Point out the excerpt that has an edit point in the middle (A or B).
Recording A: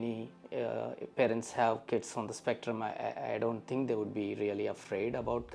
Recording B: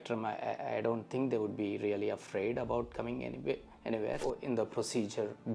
B